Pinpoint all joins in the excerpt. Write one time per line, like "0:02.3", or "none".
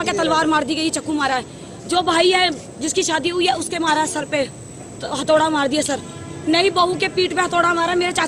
none